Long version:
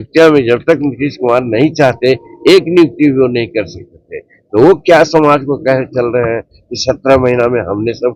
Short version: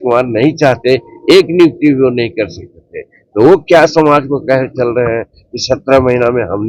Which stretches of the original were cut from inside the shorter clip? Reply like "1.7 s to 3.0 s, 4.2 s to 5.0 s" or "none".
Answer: none